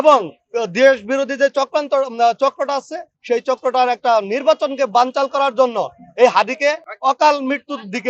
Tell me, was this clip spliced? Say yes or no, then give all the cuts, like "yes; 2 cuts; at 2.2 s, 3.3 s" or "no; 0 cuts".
yes; 1 cut; at 6.9 s